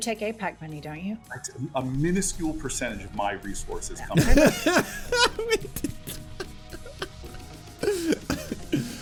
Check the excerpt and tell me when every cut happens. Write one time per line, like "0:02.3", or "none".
none